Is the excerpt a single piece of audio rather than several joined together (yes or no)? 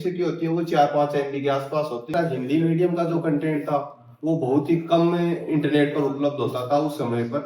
no